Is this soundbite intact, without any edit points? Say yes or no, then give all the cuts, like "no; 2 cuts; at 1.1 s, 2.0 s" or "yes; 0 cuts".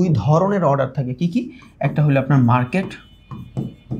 yes; 0 cuts